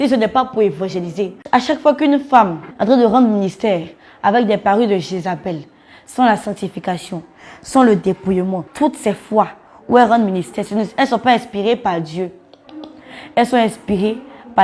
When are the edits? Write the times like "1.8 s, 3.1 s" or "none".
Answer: 1.4 s, 2.6 s, 8.7 s